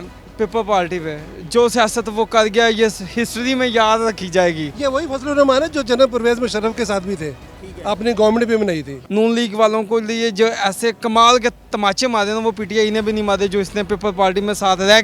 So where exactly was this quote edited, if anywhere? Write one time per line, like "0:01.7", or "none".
0:04.7
0:08.9